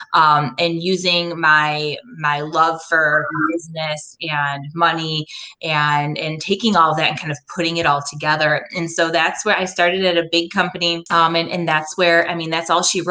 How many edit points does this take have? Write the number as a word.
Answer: one